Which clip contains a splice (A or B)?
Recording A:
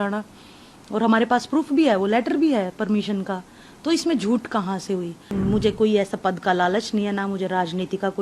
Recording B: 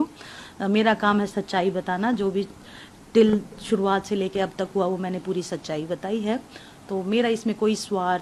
A